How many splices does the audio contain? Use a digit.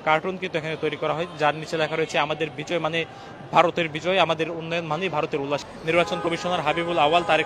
1